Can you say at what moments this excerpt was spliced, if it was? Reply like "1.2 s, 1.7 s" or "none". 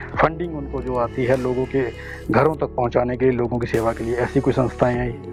none